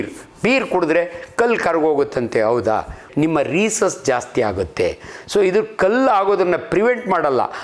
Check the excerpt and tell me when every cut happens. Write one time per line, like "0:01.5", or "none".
0:03.0